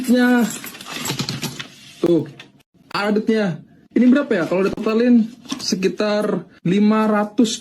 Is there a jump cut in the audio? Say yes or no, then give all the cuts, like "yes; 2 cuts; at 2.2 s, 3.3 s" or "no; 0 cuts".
no; 0 cuts